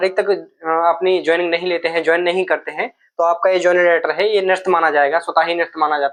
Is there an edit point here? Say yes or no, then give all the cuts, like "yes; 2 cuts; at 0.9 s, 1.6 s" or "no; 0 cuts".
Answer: no; 0 cuts